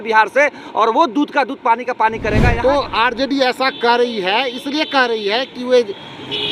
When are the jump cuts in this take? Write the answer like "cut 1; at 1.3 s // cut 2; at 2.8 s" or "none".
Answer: cut 1; at 2.5 s